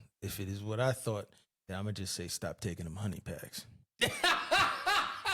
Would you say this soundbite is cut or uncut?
uncut